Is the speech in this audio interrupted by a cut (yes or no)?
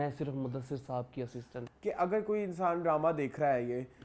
yes